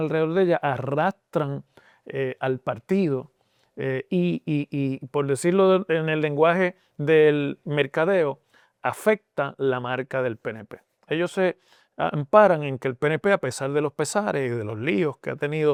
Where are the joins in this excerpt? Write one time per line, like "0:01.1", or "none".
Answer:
none